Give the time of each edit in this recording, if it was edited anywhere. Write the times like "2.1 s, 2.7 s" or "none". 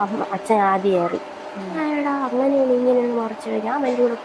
1.8 s